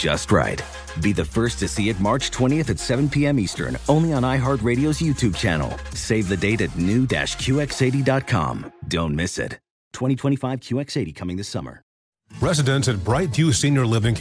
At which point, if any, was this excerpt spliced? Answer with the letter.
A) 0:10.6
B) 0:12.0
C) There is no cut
B